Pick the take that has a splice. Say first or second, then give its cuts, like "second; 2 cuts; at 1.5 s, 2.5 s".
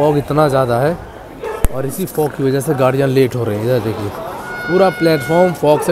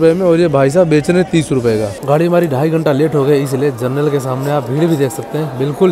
second; 1 cut; at 2.0 s